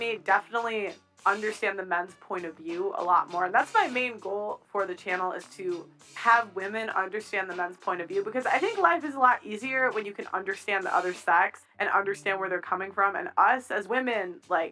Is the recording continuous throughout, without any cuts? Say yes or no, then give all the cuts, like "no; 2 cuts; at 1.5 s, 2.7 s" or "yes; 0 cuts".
no; 2 cuts; at 3.3 s, 11.7 s